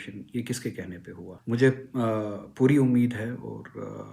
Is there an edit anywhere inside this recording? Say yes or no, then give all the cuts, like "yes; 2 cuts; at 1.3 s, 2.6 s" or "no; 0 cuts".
yes; 1 cut; at 1.3 s